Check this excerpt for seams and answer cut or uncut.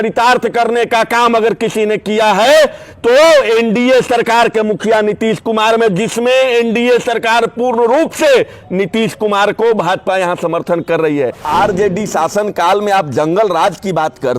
cut